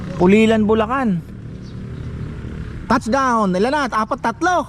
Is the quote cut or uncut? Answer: uncut